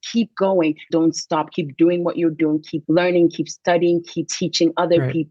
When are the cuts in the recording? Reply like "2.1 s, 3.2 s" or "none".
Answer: 0.9 s, 2.7 s, 4.3 s